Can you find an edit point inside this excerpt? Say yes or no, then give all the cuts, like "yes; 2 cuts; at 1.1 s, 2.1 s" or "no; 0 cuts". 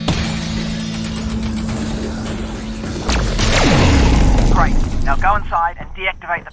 no; 0 cuts